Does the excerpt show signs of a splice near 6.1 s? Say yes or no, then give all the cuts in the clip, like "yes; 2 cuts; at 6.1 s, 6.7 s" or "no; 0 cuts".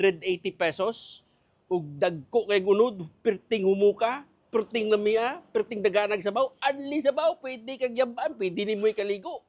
no; 0 cuts